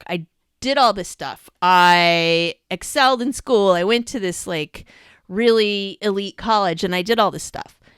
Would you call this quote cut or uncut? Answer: uncut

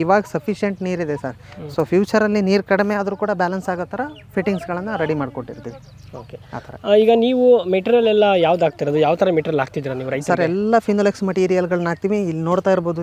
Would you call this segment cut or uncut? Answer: uncut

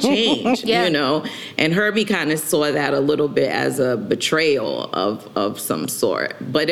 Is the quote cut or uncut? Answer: uncut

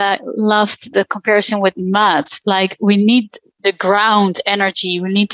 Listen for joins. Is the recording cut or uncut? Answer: uncut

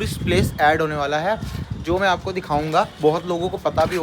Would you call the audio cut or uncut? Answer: uncut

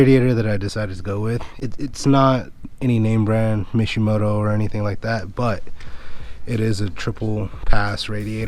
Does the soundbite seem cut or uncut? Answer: cut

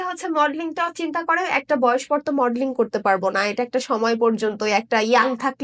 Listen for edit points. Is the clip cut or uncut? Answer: uncut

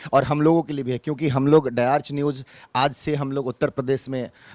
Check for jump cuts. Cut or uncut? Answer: uncut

